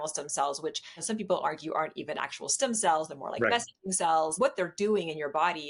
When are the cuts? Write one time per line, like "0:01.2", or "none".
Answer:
0:00.9
0:04.4